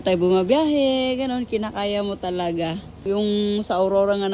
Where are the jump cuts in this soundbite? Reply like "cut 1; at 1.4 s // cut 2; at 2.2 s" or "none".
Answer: none